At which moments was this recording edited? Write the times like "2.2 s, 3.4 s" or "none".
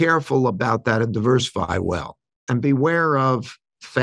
2.4 s